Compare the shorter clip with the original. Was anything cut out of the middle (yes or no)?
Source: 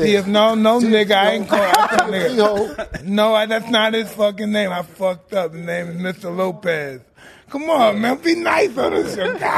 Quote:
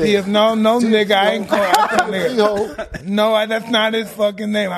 no